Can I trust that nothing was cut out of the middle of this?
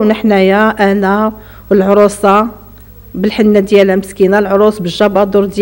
yes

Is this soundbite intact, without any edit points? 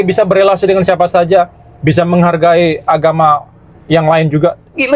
yes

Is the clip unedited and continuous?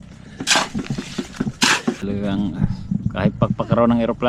no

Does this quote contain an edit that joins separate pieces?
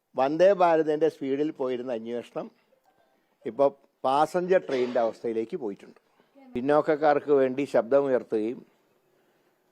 yes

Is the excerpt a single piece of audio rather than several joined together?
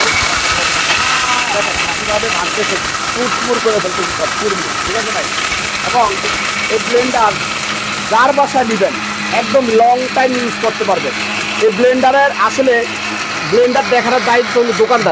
yes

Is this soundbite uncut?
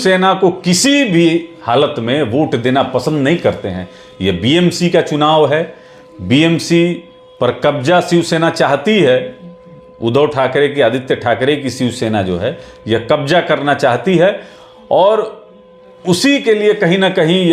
yes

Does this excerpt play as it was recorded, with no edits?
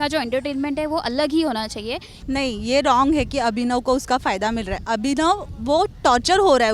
no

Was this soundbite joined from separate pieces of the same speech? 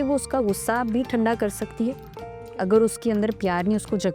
no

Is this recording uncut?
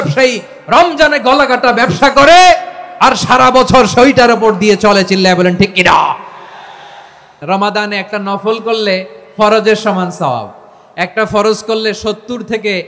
no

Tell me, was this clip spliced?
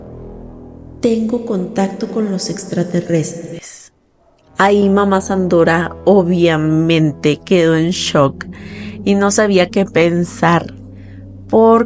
no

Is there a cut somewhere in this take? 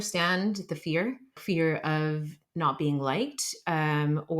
yes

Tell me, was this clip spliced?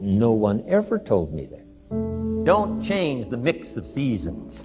yes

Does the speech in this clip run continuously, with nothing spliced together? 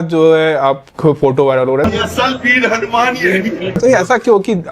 no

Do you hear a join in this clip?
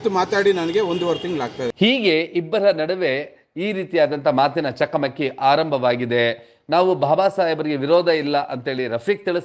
no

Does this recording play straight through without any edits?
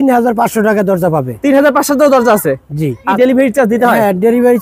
no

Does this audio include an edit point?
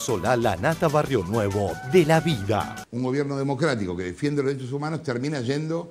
yes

